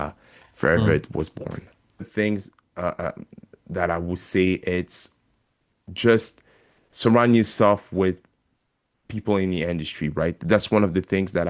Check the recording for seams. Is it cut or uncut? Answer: cut